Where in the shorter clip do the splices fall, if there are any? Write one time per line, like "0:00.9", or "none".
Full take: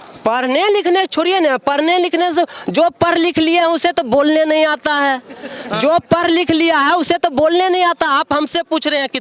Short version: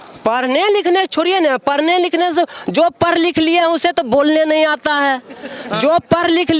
none

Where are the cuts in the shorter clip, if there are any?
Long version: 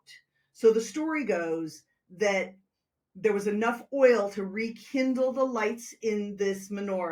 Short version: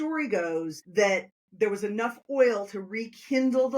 0:01.0

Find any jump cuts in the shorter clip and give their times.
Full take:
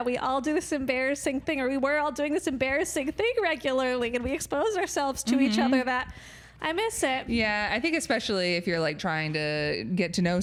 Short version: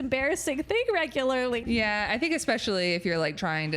0:01.6

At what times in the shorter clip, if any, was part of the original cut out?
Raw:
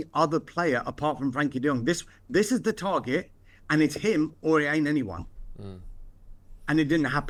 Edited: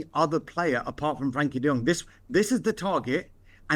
none

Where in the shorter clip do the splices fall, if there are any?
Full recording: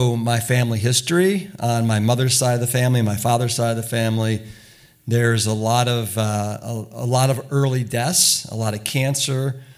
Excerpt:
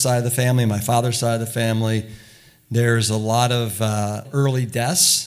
0:04.3

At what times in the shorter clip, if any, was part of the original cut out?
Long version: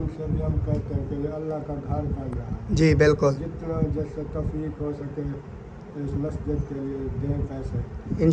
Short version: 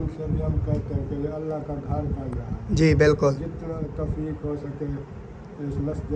0:03.8

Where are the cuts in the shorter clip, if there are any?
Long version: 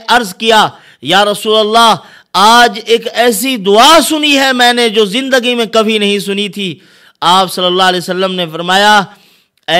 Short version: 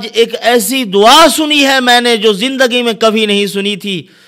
none

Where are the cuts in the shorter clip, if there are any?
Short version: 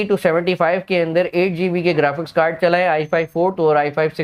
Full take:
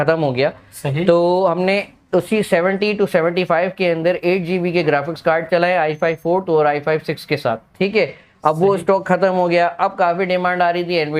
none

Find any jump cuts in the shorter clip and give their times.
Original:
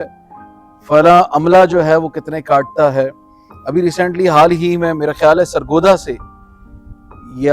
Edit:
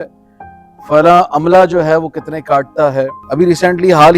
0:03.2

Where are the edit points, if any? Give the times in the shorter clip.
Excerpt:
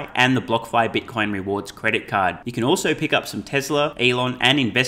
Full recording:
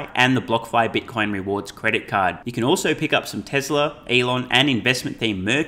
0:03.9

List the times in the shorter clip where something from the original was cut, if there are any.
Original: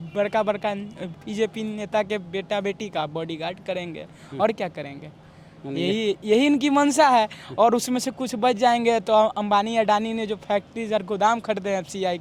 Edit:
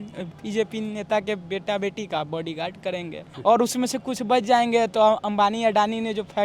0:03.3

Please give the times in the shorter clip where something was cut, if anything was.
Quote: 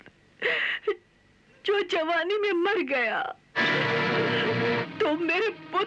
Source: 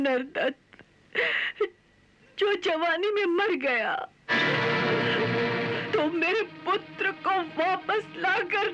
0:04.9

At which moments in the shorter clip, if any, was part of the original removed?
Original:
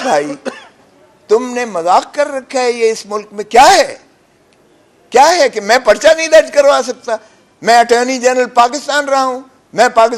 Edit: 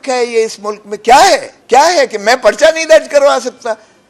0:01.5

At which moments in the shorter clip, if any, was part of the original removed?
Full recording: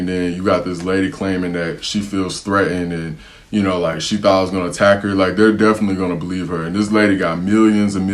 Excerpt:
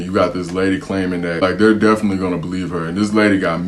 0:01.4

